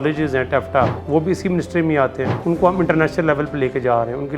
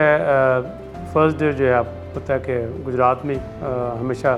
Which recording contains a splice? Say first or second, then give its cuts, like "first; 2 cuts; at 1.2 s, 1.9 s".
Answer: first; 2 cuts; at 1.0 s, 2.3 s